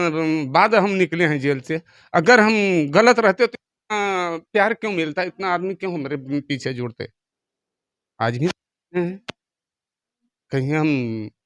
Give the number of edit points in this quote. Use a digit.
0